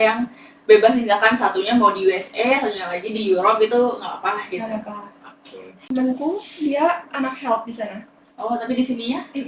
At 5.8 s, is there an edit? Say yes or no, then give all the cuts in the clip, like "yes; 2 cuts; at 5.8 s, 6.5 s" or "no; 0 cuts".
yes; 1 cut; at 5.8 s